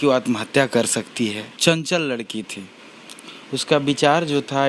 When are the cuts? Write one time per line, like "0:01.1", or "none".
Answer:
0:01.5